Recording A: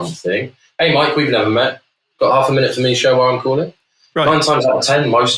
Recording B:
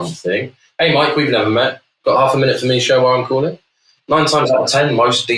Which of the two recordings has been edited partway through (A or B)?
B